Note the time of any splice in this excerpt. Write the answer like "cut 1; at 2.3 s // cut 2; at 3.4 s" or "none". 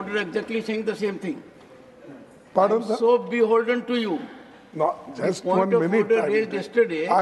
none